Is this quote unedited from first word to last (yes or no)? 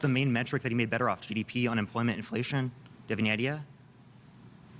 yes